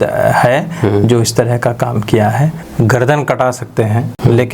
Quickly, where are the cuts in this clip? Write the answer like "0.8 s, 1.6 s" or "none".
2.6 s